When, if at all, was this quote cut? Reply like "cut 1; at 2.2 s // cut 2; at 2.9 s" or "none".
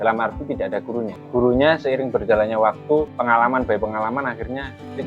cut 1; at 1.2 s // cut 2; at 3.1 s

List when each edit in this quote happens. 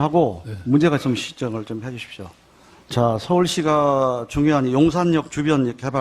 cut 1; at 4.7 s

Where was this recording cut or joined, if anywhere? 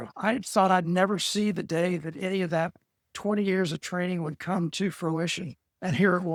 none

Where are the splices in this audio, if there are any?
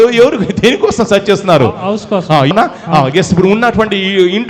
cut 1; at 2.5 s

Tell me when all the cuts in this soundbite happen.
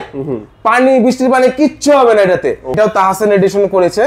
cut 1; at 2.6 s

